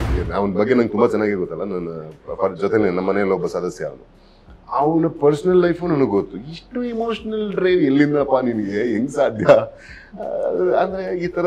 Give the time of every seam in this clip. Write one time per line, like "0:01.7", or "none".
none